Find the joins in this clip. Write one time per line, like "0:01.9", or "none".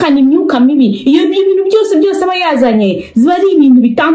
none